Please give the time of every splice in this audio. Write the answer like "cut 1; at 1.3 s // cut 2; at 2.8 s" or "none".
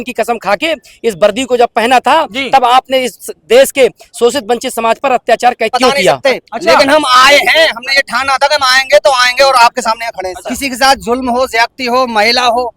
cut 1; at 6.2 s // cut 2; at 10.4 s